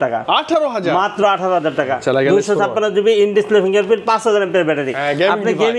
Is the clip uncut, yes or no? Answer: yes